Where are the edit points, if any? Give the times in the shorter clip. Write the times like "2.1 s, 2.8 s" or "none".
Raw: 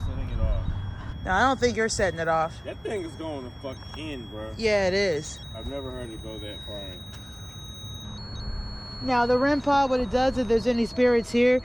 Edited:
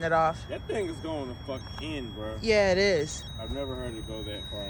none